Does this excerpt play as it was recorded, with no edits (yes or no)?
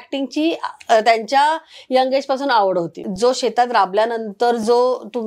no